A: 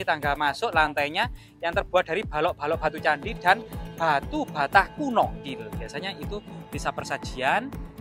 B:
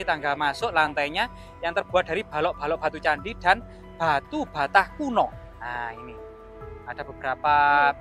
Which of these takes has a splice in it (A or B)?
A